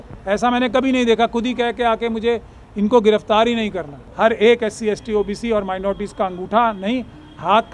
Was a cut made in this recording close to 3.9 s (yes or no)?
yes